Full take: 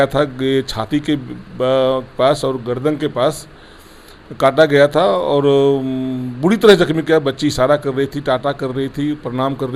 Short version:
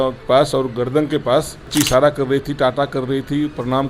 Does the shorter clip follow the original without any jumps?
no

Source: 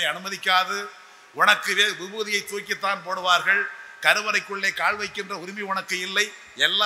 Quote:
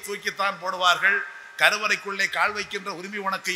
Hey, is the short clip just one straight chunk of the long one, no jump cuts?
yes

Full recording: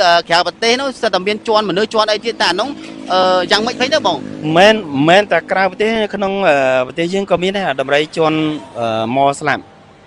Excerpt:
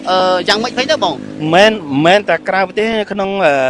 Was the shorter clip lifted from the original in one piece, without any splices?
yes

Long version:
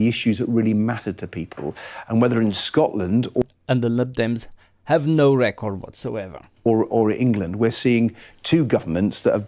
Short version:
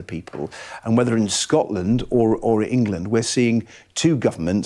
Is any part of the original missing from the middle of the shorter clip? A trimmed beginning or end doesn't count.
yes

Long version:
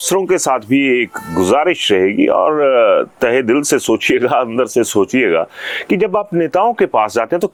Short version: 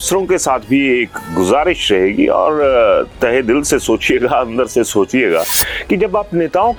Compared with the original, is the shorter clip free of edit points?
yes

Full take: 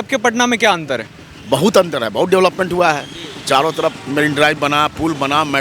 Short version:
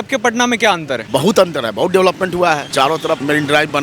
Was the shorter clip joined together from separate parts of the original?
yes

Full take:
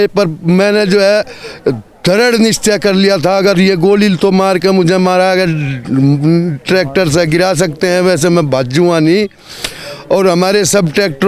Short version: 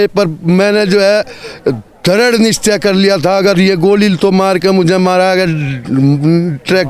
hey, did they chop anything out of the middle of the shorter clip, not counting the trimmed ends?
no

